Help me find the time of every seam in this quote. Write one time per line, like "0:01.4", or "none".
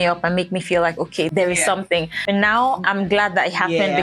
0:01.3
0:02.2